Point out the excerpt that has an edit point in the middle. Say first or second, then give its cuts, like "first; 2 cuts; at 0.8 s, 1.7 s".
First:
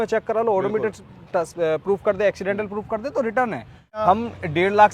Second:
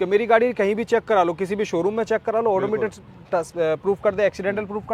first; 1 cut; at 4.0 s